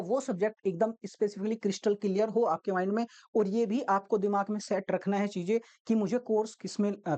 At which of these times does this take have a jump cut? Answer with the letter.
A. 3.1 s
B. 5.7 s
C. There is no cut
C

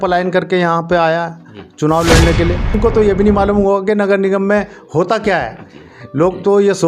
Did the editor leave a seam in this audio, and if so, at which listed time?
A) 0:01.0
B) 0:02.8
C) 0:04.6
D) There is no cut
B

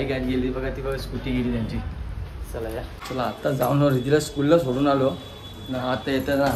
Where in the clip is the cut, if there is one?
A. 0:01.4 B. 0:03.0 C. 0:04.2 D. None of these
B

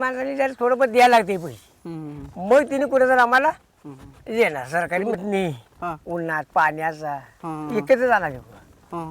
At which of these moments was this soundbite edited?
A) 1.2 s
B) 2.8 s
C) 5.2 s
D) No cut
C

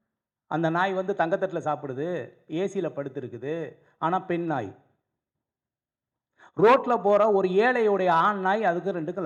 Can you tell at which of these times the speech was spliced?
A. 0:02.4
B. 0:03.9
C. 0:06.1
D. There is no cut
D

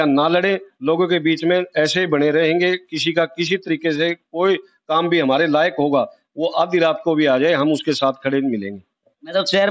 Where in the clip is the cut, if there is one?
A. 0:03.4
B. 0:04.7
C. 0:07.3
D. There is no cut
D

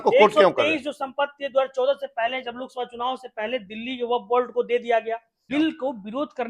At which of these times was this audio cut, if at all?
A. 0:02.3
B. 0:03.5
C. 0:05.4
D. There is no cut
C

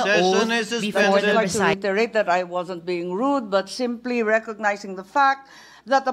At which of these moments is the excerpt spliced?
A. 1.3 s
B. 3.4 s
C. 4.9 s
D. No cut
A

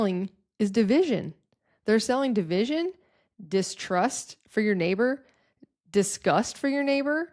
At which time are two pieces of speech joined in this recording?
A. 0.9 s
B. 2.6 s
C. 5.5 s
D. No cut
D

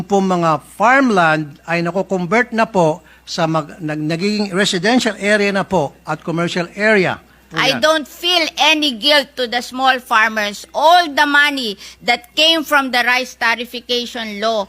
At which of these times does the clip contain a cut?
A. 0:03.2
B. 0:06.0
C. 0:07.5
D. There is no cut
C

